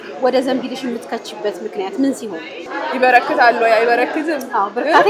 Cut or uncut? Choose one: cut